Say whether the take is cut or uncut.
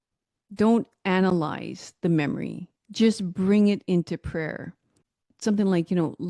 cut